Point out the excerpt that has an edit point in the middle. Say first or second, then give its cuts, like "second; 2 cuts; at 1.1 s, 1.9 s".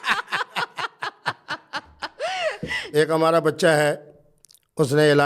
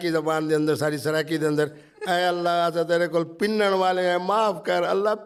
first; 1 cut; at 2.8 s